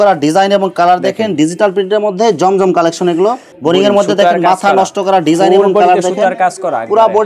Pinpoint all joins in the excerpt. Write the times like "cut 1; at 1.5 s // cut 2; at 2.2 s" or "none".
cut 1; at 3.5 s